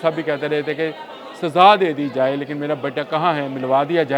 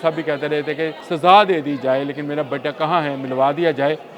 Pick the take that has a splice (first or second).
second